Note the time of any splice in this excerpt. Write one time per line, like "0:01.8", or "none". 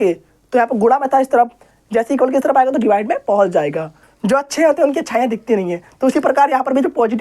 0:04.1